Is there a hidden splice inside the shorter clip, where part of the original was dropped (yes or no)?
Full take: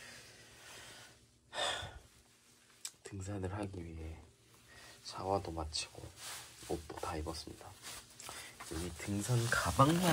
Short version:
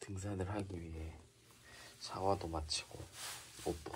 no